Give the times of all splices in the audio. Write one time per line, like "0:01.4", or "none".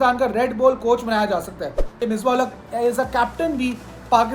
0:02.0